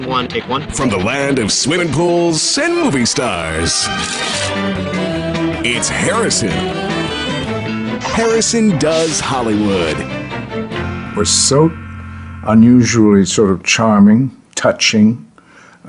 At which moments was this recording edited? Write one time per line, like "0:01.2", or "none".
none